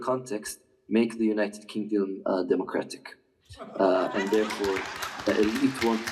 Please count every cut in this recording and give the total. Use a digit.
0